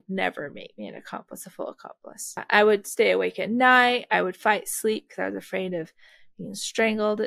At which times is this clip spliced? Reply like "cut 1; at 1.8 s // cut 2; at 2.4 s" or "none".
cut 1; at 2.4 s